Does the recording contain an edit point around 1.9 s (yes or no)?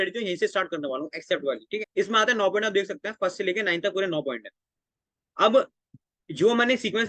yes